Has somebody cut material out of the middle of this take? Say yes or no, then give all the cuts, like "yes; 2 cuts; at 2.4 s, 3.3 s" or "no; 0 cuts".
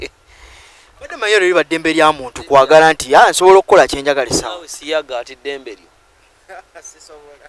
no; 0 cuts